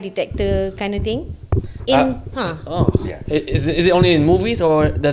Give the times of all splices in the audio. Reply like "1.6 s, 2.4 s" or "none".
none